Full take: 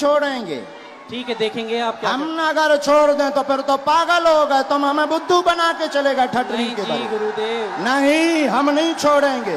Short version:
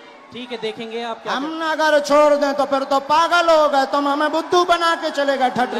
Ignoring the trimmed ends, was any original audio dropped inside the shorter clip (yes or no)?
no